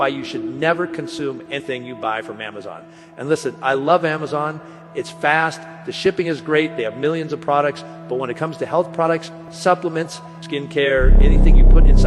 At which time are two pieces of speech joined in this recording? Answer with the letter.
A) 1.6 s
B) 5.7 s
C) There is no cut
A